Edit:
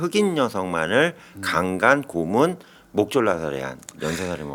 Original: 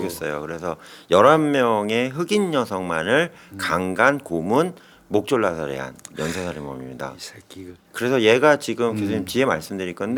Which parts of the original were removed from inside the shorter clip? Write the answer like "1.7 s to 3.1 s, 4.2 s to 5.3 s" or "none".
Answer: none